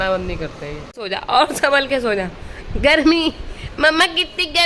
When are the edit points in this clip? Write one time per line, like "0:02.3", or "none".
0:01.0